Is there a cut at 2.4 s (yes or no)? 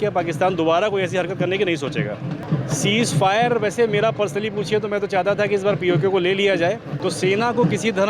yes